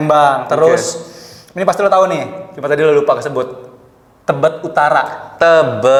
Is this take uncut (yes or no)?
yes